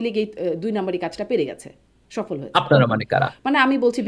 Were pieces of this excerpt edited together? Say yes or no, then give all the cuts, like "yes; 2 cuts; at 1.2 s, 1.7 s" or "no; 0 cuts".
no; 0 cuts